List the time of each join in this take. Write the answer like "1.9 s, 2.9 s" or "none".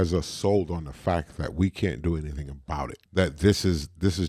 3.0 s